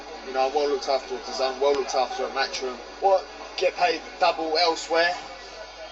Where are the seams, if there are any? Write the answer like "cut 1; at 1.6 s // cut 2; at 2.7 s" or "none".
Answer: none